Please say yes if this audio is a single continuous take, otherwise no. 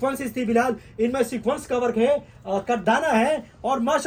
yes